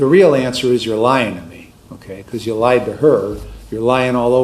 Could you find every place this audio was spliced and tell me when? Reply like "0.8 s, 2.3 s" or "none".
none